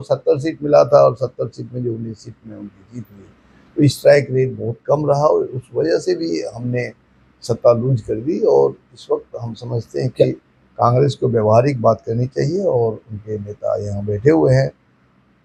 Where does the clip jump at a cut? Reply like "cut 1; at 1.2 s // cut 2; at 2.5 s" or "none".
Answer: none